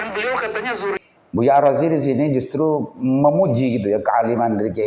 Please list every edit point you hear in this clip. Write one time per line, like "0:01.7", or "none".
0:01.0